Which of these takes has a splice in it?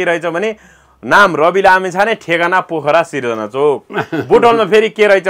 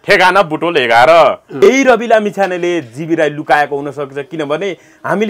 second; 1 cut; at 1.5 s

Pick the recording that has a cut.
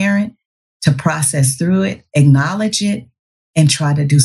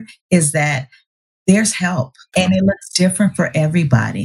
second; 1 cut; at 2.3 s

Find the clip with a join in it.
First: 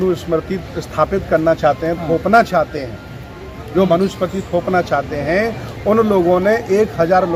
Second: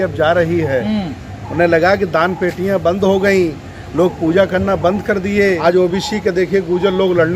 second; 1 cut; at 5.6 s

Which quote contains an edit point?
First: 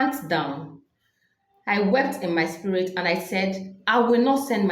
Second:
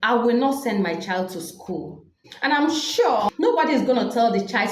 second; 2 cuts; at 2.2 s, 3.3 s

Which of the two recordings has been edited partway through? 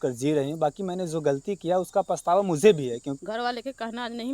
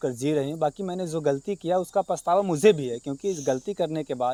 first; 1 cut; at 3.2 s

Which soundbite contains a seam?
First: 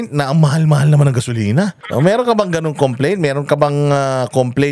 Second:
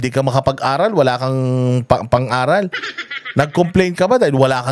first; 1 cut; at 1.8 s

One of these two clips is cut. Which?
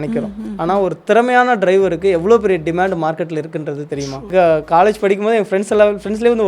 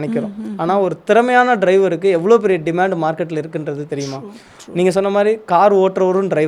first; 1 cut; at 4.3 s

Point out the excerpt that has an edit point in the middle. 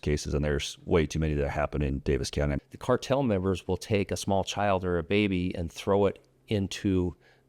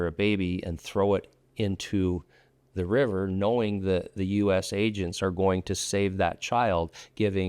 first; 1 cut; at 2.6 s

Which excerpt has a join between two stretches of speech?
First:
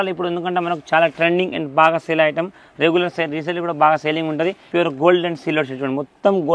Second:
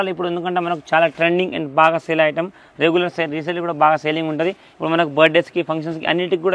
first; 1 cut; at 4.6 s

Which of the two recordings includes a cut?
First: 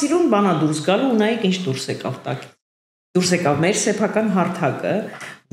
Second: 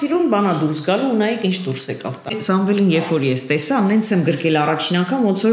second; 1 cut; at 2.4 s

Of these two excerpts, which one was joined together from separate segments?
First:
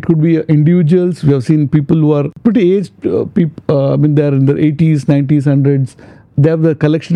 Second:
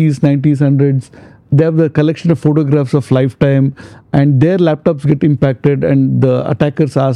first; 1 cut; at 2.3 s

